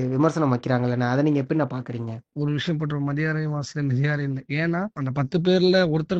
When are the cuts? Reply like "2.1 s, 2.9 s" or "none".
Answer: 2.3 s, 5.0 s